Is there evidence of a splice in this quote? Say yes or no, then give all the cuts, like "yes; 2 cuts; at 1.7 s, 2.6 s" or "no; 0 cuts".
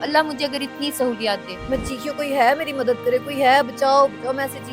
yes; 1 cut; at 1.5 s